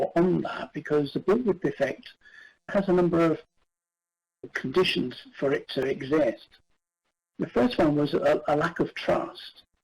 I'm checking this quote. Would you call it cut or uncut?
cut